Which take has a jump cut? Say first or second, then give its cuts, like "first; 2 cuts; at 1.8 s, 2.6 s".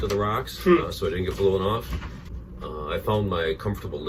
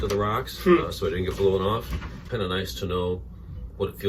second; 1 cut; at 2.2 s